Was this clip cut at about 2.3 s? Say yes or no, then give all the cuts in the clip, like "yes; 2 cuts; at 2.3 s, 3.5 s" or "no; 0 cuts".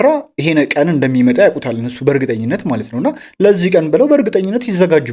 no; 0 cuts